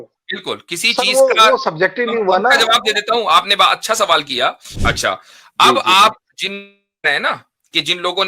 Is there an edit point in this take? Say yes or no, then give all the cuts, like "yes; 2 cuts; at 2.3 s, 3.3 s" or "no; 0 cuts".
yes; 1 cut; at 4.7 s